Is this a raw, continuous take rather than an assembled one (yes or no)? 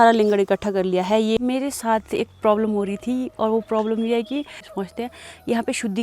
no